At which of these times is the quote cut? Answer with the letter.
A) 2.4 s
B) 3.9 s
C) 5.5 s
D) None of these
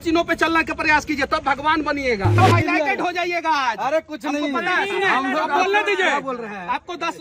A